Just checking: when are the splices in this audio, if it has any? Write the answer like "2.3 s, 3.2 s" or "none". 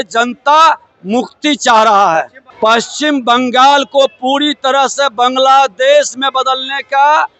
2.4 s

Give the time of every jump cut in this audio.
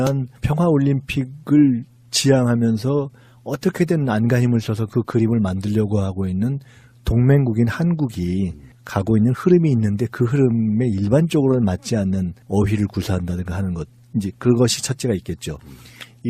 9.1 s

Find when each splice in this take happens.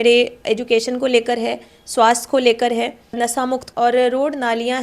3.5 s

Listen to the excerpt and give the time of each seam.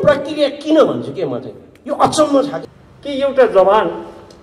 2.6 s

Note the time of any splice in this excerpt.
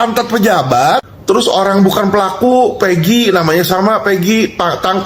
1.1 s

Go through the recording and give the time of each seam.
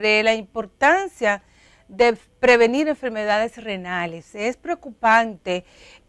4.4 s

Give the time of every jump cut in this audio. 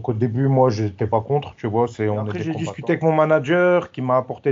2.5 s

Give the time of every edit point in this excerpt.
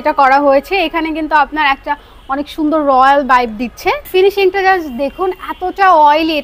4.0 s

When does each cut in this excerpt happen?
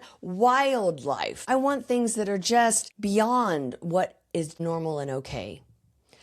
1.4 s, 2.9 s, 4.5 s

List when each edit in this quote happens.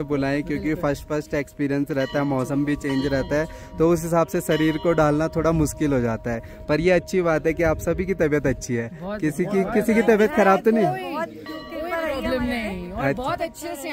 none

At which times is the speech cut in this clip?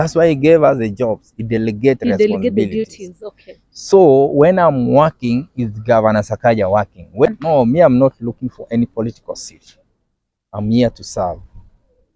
7.3 s

